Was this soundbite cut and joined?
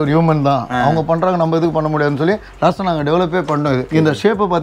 yes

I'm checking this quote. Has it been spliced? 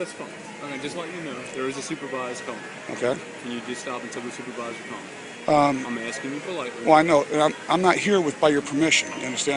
yes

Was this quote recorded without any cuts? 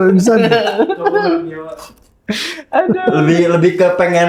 yes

